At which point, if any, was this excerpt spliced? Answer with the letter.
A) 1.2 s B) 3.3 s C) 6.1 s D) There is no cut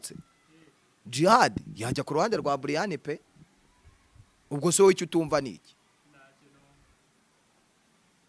D